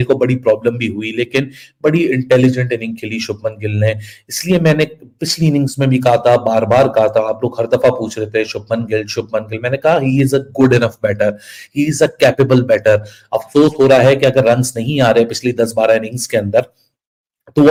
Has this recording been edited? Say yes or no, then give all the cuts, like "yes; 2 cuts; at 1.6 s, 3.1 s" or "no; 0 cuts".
no; 0 cuts